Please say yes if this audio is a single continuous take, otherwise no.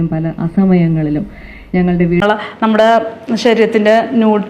no